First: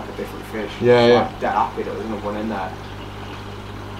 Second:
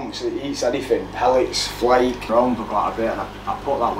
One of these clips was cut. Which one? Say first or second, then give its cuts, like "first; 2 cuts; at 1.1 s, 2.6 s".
second; 1 cut; at 2.3 s